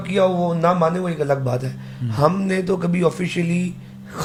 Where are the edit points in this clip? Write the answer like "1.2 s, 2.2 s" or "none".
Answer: none